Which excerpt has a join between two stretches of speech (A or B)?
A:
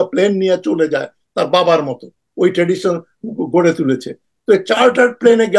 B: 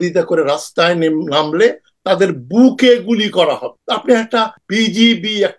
B